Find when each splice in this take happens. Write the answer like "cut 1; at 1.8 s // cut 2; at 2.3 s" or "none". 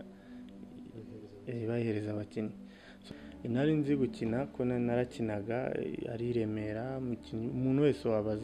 cut 1; at 3.0 s